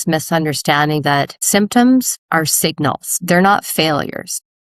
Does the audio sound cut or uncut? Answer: cut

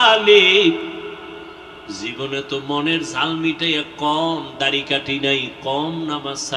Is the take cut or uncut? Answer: uncut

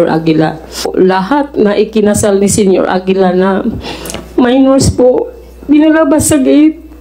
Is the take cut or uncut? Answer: cut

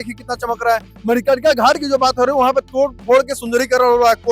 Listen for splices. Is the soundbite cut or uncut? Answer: uncut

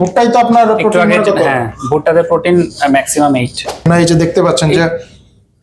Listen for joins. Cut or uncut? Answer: cut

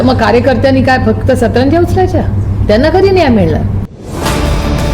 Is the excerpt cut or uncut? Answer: cut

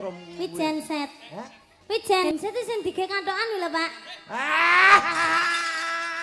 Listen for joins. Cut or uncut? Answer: cut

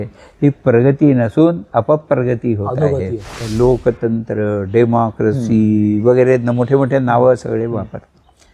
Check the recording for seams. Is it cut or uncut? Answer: cut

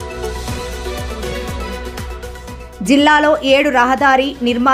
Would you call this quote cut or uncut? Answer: cut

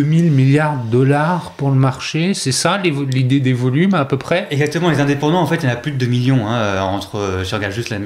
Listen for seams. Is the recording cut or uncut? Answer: uncut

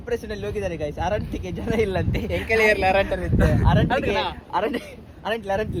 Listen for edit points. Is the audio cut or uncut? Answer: uncut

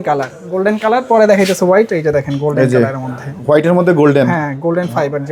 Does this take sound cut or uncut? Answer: uncut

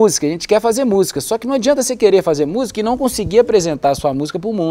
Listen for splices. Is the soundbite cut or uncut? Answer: uncut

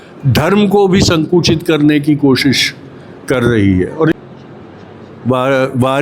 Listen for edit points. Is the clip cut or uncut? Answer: cut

